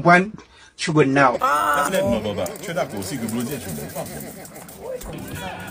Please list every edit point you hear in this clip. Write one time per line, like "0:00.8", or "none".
0:01.4